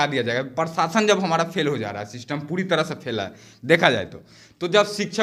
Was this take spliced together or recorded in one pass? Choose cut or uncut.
uncut